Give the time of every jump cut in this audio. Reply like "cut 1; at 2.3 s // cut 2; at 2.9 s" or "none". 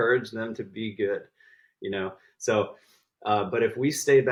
none

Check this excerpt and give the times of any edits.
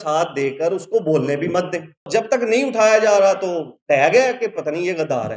cut 1; at 2.1 s

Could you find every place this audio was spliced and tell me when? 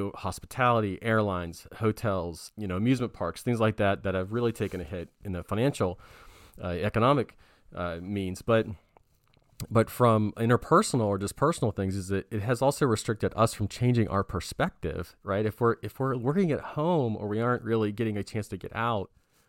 cut 1; at 2.4 s

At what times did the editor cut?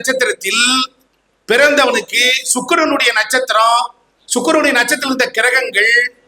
none

